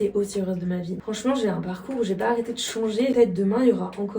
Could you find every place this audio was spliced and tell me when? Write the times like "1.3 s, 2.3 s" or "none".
1.0 s, 3.1 s